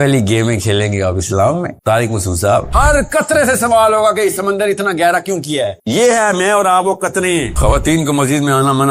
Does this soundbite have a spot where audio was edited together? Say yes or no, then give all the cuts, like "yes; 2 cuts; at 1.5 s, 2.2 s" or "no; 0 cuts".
yes; 2 cuts; at 2.7 s, 7.5 s